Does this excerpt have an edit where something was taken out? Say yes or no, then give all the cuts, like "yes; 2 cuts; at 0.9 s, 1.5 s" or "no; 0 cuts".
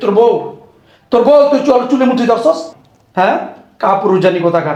no; 0 cuts